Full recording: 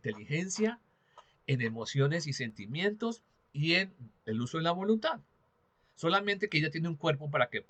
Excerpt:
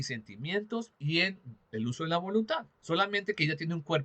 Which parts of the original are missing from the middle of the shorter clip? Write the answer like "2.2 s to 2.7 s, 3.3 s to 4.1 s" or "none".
3.2 s to 3.5 s, 5.3 s to 5.9 s